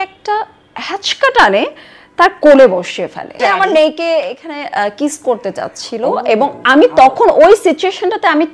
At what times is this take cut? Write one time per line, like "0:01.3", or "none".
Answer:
0:03.4